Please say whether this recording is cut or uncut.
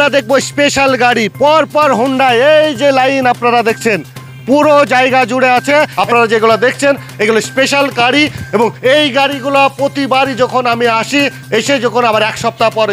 cut